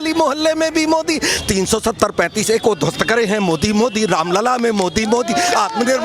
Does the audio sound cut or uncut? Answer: cut